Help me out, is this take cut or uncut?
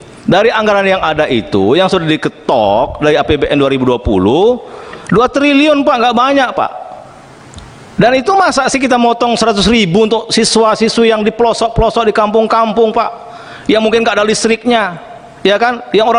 uncut